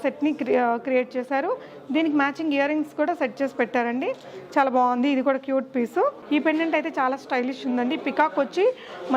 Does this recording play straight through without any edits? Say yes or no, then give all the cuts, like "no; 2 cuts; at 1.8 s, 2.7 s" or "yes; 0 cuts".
no; 1 cut; at 6.2 s